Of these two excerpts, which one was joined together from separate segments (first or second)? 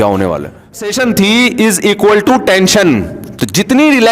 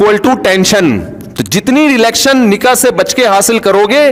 first